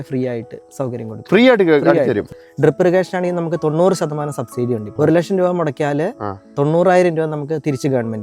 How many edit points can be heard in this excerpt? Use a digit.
2